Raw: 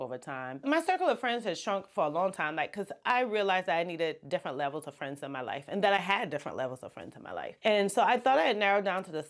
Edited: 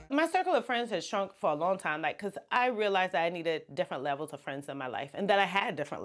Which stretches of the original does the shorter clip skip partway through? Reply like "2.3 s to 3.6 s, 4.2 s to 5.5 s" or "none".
none